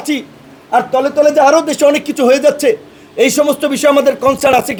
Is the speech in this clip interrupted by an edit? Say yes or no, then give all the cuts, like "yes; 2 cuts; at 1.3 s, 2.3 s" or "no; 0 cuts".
no; 0 cuts